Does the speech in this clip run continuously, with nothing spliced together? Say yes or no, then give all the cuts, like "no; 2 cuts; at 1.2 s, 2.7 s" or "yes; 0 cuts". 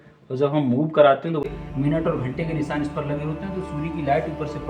no; 1 cut; at 1.4 s